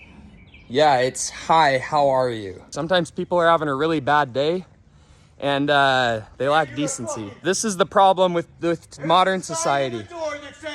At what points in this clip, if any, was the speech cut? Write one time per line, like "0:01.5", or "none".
0:02.6
0:07.3

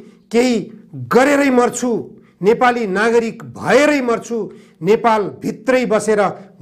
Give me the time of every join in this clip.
none

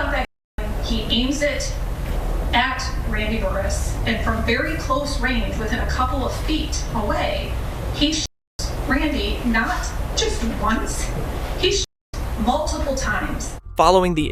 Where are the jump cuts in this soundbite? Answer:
none

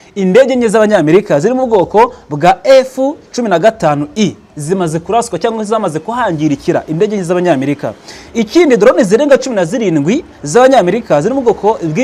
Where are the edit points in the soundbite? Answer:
none

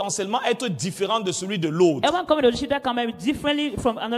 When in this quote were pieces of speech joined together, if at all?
none

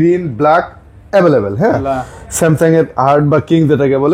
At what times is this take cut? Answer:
0:01.8

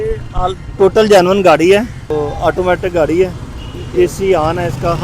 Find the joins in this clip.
0:02.0

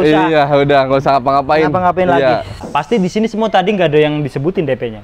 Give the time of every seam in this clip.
0:02.6

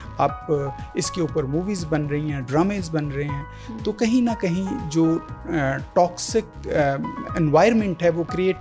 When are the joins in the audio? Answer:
none

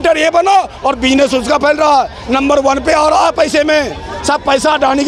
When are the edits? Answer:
none

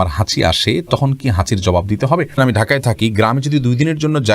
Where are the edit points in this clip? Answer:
0:02.3

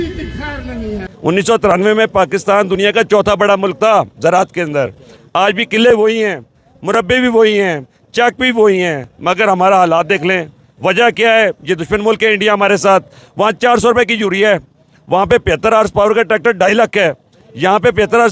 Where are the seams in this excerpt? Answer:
0:01.1

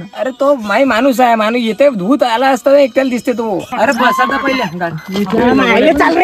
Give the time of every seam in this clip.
0:03.7

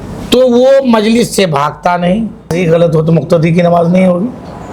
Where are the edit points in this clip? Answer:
0:02.5

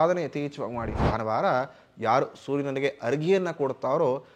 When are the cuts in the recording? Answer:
0:01.0

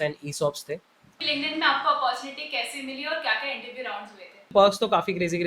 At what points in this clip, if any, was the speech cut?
0:01.0
0:04.5

